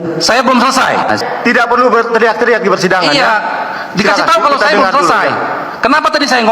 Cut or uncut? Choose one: cut